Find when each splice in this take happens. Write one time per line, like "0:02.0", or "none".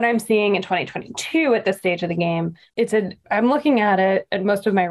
0:03.0